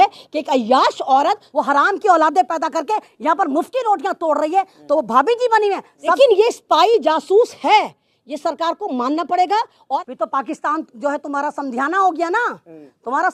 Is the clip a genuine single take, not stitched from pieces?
no; 3 cuts; at 1.5 s, 6.2 s, 10.0 s

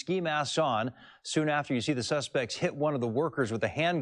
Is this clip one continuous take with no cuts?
no; 1 cut; at 3.0 s

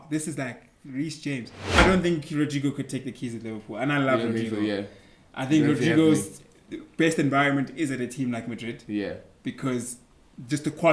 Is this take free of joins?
no; 1 cut; at 1.8 s

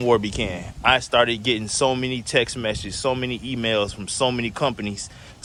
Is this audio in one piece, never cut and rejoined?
yes; 0 cuts

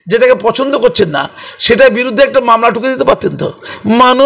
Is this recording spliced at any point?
no; 0 cuts

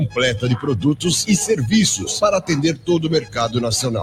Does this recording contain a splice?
no; 0 cuts

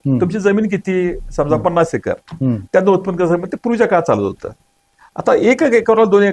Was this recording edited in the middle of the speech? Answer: no; 0 cuts

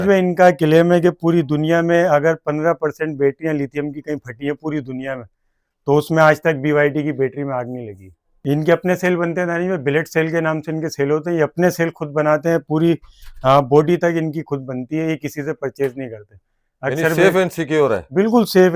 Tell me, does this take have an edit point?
yes; 1 cut; at 8.2 s

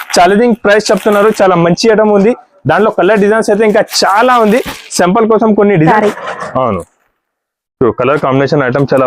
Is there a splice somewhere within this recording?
yes; 1 cut; at 5.9 s

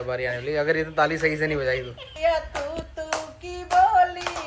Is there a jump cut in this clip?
yes; 1 cut; at 2.0 s

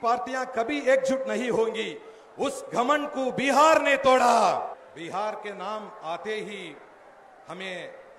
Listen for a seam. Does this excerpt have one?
yes; 1 cut; at 4.8 s

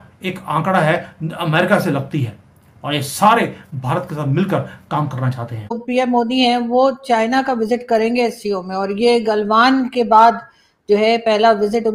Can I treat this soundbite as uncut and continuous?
no; 1 cut; at 5.8 s

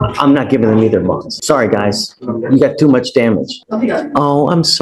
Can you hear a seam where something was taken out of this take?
yes; 2 cuts; at 1.3 s, 3.6 s

